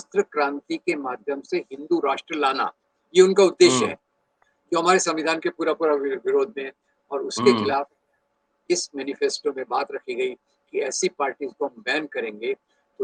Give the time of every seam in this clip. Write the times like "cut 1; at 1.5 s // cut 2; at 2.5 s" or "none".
none